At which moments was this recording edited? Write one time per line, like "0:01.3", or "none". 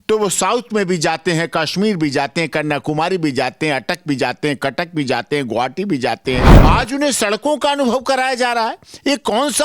0:06.5

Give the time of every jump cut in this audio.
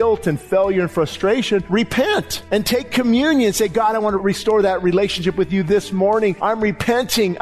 0:01.7
0:02.4
0:04.2
0:06.4

